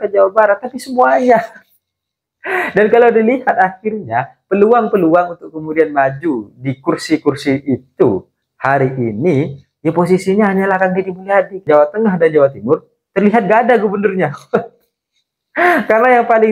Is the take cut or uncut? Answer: cut